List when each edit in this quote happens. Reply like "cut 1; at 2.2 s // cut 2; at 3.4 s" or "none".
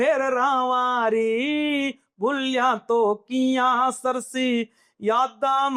none